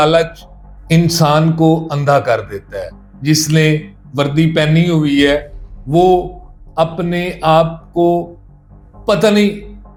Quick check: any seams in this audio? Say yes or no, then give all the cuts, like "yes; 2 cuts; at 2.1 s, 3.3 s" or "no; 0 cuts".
no; 0 cuts